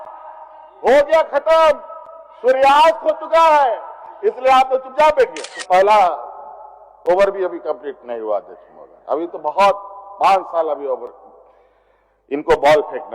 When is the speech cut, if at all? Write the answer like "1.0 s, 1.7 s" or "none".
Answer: 5.5 s